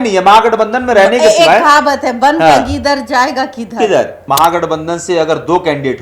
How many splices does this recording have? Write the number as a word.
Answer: one